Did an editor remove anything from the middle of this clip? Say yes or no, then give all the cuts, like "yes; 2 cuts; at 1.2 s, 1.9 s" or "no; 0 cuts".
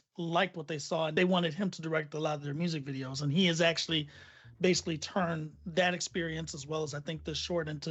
no; 0 cuts